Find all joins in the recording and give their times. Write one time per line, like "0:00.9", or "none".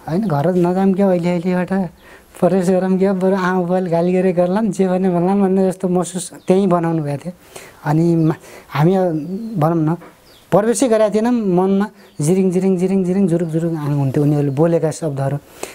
none